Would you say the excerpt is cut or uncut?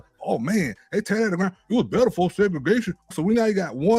cut